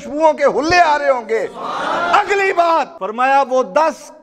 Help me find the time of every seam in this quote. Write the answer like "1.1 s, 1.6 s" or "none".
3.0 s